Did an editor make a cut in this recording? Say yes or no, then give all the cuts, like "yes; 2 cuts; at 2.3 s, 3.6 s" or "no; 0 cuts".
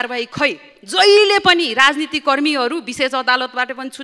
no; 0 cuts